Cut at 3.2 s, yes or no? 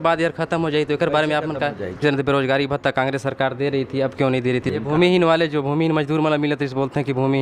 no